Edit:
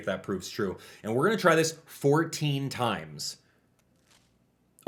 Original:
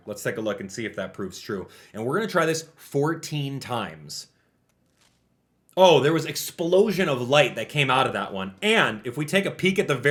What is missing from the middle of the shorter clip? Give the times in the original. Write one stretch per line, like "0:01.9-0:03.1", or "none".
none

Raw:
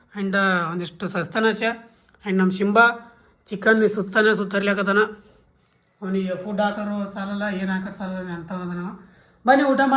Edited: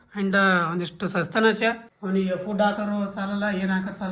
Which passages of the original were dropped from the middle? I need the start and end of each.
0:01.9-0:05.9

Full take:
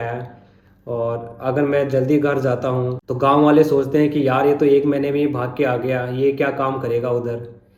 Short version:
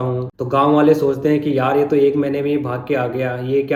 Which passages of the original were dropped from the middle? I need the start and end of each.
none

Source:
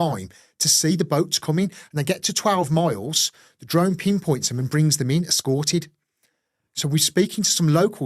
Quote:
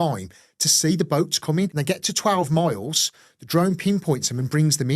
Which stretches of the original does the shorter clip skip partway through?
0:01.8-0:02.0

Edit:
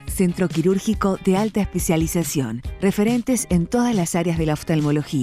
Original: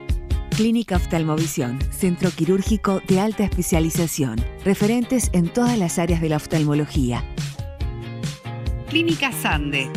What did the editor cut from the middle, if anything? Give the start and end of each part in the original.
none

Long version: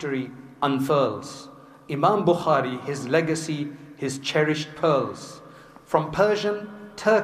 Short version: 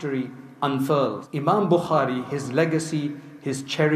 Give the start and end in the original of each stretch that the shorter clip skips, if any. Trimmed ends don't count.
0:01.3-0:01.8

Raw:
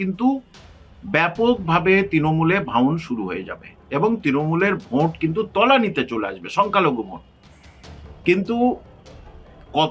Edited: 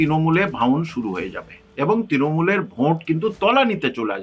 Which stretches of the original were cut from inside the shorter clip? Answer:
none

